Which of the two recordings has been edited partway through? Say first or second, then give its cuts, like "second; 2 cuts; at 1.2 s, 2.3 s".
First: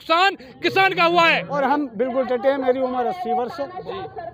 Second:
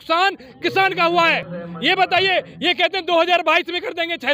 first; 1 cut; at 1.5 s